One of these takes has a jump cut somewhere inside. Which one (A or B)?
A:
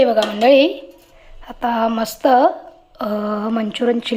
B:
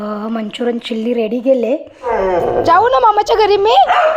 B